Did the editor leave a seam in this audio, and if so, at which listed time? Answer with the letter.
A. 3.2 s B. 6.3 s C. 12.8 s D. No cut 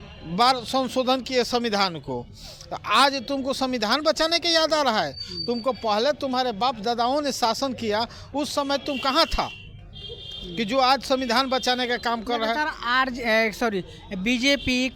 D